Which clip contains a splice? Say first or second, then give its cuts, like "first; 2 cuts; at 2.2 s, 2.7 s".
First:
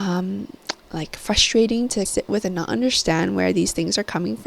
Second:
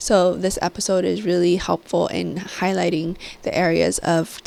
first; 1 cut; at 2.1 s